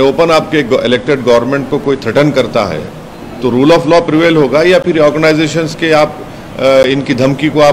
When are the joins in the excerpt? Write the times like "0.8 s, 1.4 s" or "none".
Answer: none

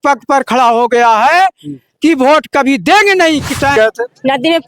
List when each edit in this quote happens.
3.7 s

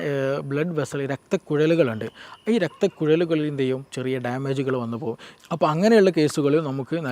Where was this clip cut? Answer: 5.3 s

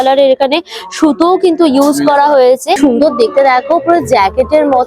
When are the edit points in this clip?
2.8 s

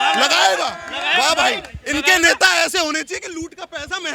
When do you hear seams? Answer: none

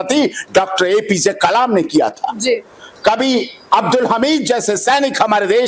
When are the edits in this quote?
none

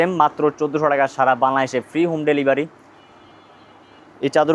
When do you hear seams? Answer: none

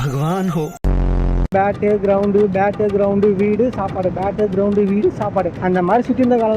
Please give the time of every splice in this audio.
1.5 s, 5.5 s

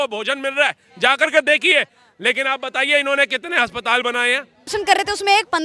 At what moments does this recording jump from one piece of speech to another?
4.6 s

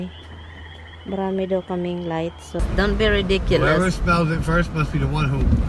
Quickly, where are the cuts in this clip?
2.6 s

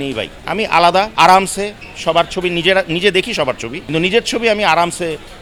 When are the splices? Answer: none

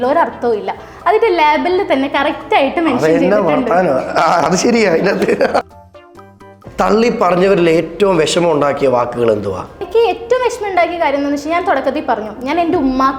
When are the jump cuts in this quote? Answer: 6.1 s, 9.8 s

